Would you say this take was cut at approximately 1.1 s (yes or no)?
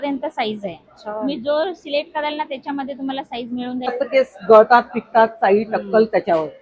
no